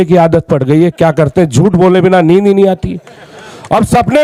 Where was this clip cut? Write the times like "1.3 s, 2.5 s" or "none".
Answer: none